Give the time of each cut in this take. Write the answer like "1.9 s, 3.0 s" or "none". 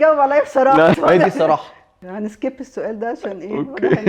1.0 s, 2.1 s